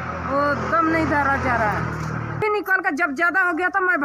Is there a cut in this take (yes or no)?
yes